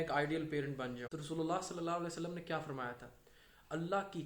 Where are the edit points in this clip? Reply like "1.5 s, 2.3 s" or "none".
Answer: 1.1 s